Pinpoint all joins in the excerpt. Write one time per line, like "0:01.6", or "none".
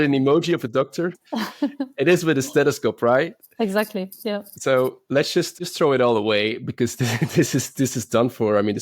0:05.5